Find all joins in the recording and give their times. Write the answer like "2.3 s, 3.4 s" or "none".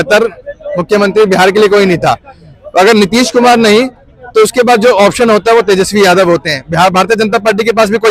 none